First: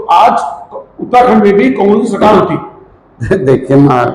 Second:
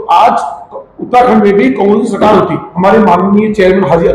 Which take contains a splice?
second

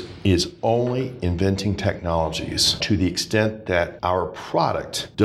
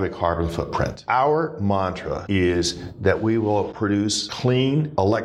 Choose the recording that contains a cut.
second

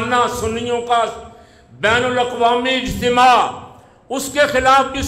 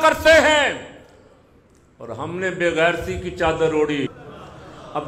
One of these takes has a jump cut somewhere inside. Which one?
second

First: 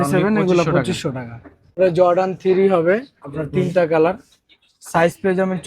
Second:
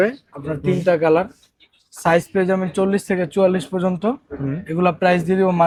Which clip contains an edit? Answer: first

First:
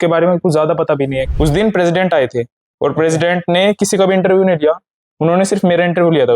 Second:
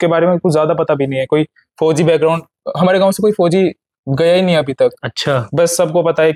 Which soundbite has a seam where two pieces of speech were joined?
first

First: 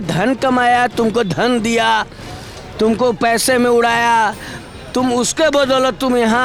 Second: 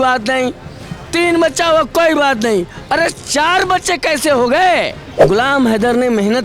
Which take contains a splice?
second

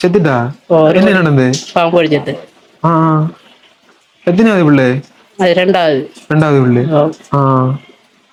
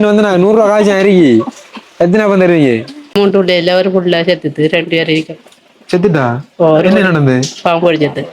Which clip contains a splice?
second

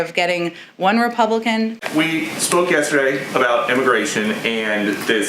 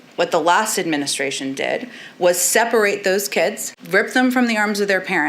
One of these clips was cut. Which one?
first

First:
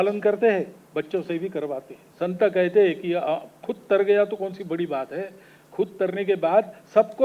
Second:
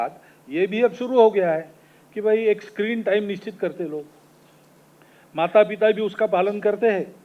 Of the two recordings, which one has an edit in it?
first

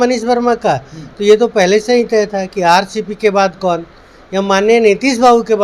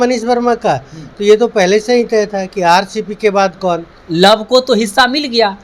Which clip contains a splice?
second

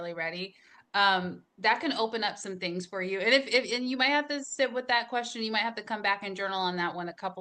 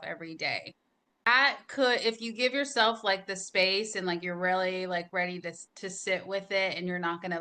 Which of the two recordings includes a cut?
second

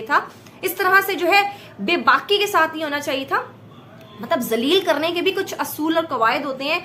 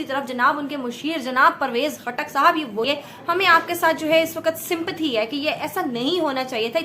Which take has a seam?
second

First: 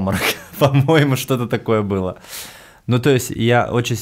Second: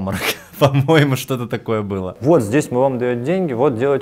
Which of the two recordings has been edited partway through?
second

